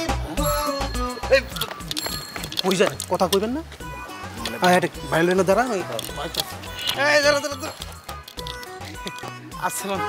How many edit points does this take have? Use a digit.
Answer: 0